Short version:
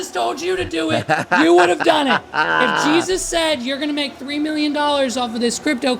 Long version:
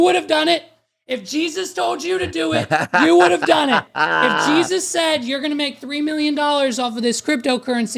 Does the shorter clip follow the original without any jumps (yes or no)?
yes